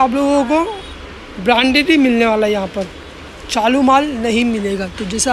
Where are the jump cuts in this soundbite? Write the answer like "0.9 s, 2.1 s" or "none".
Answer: none